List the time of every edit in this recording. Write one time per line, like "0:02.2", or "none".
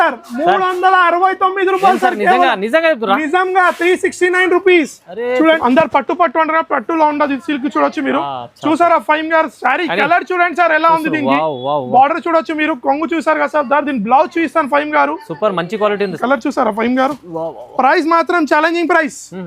0:05.6
0:16.2